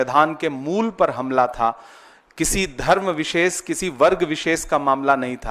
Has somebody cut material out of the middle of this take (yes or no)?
no